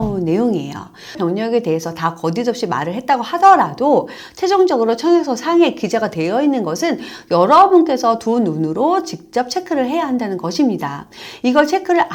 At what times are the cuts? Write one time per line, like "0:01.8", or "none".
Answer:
0:01.2